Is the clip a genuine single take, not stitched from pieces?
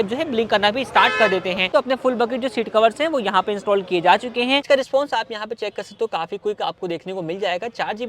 no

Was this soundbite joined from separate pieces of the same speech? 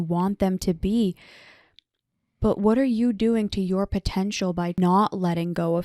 yes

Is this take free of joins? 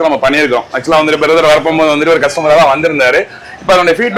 yes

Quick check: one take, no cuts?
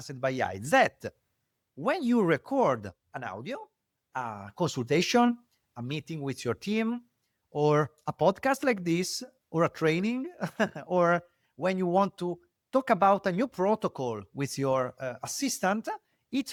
yes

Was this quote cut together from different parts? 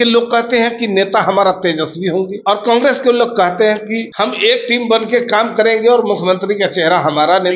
yes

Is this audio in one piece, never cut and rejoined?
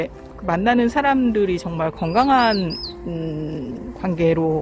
yes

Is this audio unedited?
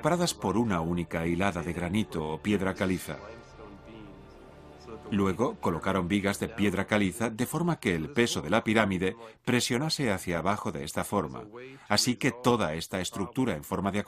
no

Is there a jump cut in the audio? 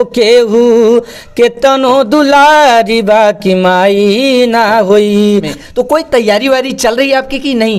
yes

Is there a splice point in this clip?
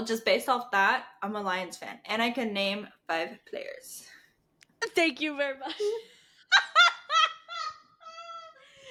no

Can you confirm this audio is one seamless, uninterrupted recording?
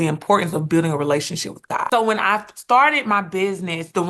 no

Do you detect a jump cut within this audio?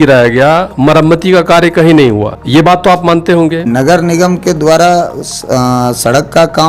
yes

